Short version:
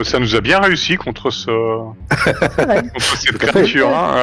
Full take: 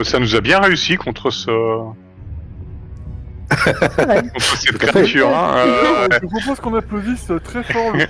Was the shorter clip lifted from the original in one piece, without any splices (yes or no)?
no